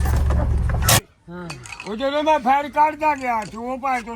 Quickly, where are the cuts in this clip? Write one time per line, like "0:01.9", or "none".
0:01.0
0:02.5